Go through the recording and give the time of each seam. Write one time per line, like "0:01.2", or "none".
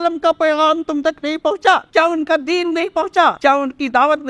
0:01.9
0:03.4